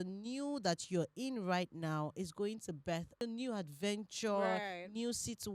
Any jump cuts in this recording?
yes; 1 cut; at 3.2 s

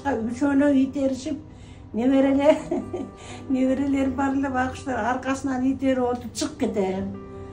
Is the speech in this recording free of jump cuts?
yes; 0 cuts

